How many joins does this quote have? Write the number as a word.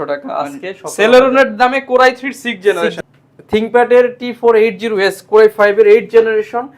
one